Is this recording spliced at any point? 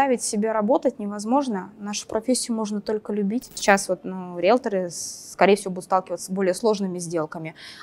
yes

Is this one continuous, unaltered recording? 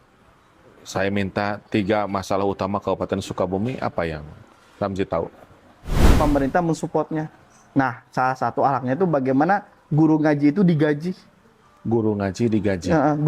no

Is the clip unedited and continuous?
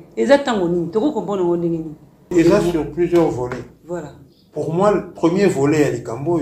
no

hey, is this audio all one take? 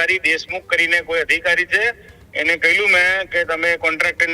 yes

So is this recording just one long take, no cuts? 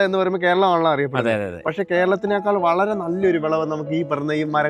yes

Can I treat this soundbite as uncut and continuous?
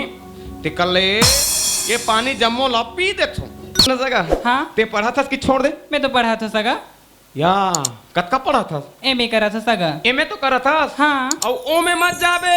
no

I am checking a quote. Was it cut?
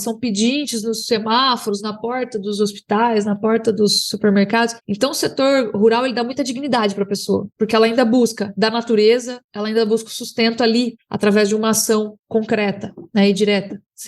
no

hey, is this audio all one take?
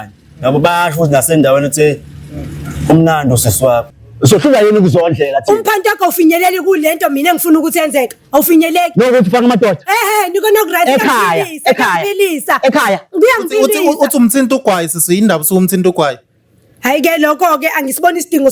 no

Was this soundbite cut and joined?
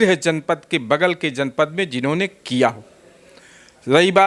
no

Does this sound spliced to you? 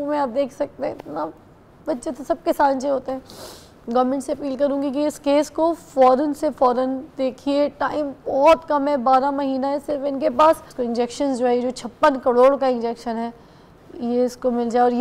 yes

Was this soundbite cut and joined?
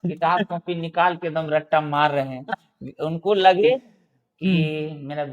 no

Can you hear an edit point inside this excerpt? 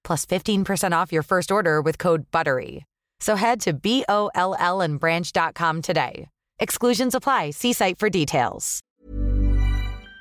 yes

